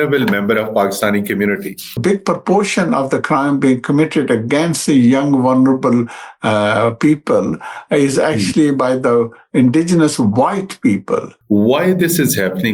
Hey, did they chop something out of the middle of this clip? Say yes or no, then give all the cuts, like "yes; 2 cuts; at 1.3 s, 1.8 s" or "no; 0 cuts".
yes; 2 cuts; at 2.0 s, 11.3 s